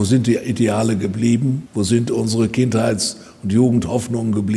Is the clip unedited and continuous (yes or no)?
no